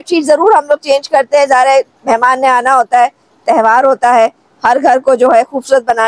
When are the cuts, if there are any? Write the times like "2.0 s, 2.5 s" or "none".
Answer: none